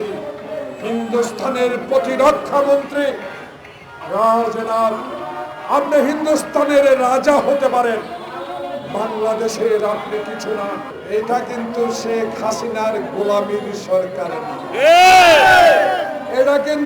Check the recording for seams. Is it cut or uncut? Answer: cut